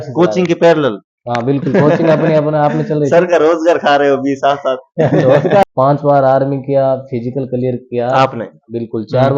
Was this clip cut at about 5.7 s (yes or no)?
yes